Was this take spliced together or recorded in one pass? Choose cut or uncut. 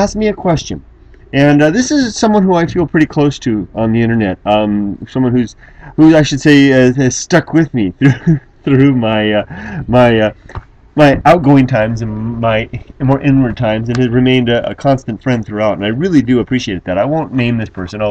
uncut